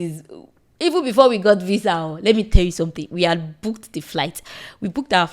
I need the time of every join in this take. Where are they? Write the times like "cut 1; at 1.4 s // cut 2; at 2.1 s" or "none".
none